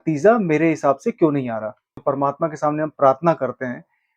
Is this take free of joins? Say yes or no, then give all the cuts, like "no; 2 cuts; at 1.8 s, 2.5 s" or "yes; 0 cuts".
no; 1 cut; at 2.0 s